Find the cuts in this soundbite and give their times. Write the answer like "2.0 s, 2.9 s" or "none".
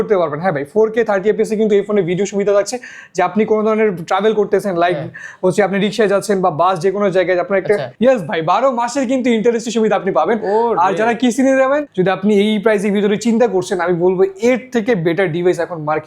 7.9 s, 11.9 s